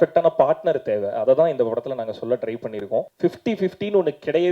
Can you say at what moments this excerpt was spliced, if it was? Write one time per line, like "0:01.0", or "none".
0:03.1